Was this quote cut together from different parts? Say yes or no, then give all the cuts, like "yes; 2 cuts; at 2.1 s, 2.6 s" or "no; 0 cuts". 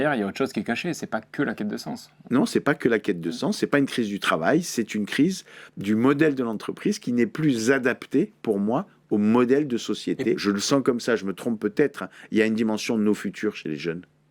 yes; 1 cut; at 10.4 s